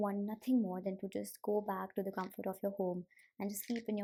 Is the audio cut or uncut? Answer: uncut